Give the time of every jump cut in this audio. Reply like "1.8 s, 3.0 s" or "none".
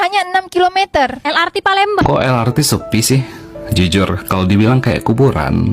2.0 s